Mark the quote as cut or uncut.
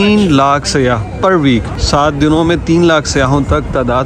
cut